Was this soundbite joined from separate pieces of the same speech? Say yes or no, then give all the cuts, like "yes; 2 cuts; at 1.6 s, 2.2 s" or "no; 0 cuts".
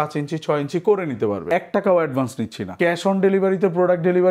yes; 2 cuts; at 1.5 s, 2.7 s